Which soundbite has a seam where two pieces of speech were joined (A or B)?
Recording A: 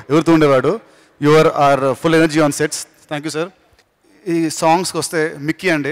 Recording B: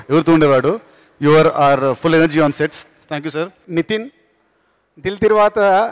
B